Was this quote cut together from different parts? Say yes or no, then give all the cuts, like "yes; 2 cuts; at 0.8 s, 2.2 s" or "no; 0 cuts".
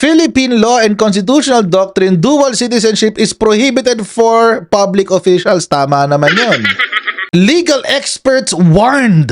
no; 0 cuts